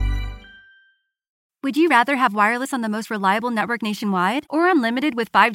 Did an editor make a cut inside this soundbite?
yes; 1 cut; at 1.5 s

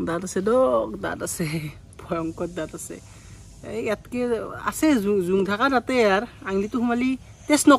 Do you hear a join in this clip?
no; 0 cuts

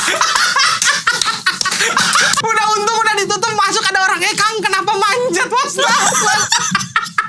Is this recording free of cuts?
no; 1 cut; at 2.4 s

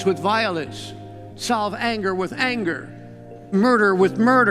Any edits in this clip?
yes; 1 cut; at 3.5 s

